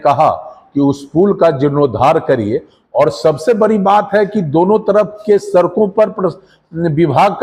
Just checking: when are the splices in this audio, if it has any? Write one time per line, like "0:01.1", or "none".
none